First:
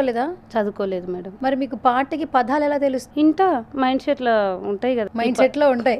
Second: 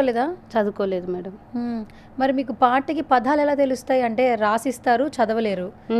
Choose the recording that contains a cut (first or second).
first